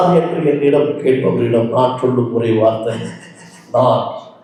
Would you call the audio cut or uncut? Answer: uncut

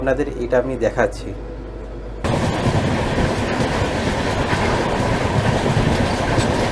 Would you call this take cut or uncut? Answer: uncut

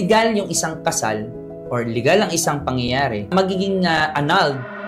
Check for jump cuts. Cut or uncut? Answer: cut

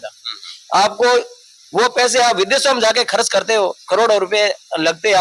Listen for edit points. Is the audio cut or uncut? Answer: uncut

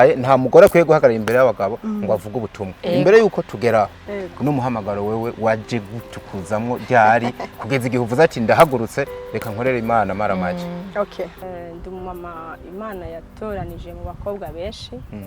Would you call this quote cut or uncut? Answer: cut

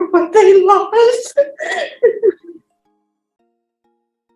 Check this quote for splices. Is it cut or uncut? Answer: uncut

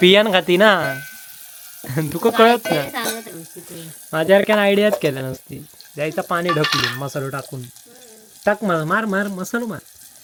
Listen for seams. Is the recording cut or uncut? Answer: uncut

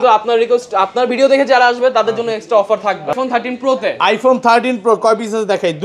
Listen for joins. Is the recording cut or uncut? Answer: cut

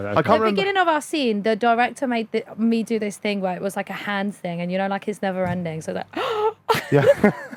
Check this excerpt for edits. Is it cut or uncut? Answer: uncut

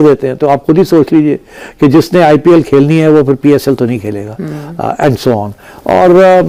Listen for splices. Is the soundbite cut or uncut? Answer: uncut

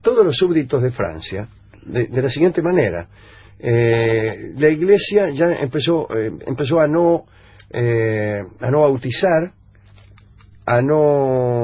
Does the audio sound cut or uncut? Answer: cut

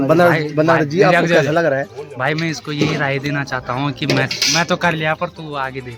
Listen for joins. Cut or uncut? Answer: uncut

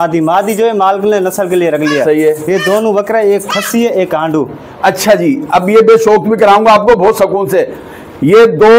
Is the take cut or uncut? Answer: uncut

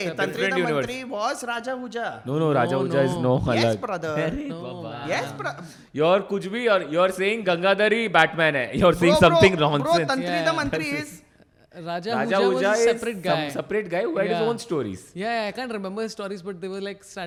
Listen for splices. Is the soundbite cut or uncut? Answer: uncut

